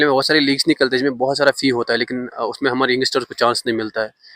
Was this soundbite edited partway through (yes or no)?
no